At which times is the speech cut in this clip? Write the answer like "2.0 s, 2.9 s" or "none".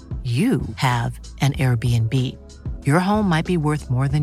none